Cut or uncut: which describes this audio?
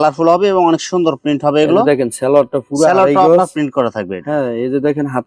uncut